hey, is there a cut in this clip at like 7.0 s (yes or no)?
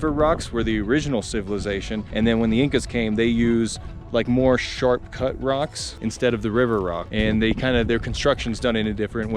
yes